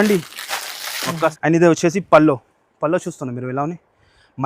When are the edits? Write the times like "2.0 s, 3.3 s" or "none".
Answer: 1.3 s